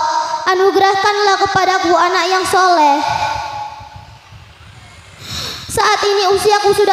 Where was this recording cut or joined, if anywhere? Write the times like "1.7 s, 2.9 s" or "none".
none